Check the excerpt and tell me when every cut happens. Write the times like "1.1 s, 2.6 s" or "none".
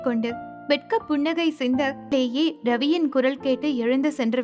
2.1 s